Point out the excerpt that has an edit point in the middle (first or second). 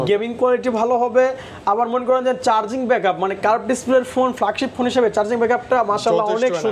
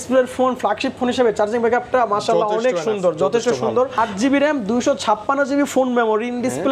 second